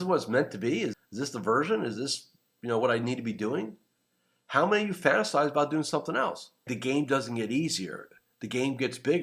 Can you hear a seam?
yes; 1 cut; at 6.7 s

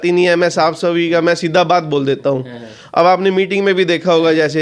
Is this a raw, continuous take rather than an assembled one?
yes; 0 cuts

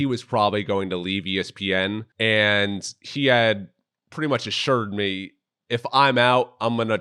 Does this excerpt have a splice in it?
yes; 1 cut; at 2.1 s

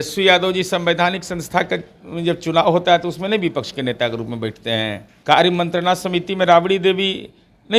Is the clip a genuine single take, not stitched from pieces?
no; 1 cut; at 5.1 s

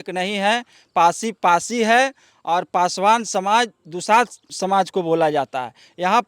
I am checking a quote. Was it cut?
yes; 1 cut; at 4.4 s

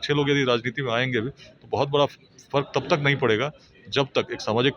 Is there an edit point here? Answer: no; 0 cuts

